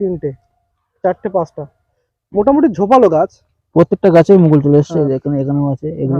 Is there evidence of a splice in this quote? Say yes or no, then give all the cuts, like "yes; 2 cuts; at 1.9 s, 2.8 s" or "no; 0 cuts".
no; 0 cuts